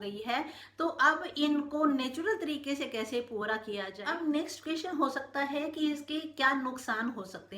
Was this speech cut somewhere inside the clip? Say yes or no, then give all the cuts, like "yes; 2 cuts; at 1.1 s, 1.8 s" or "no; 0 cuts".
yes; 1 cut; at 4.0 s